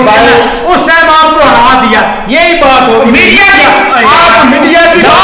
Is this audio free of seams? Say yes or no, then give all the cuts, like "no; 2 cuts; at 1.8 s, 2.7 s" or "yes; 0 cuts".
yes; 0 cuts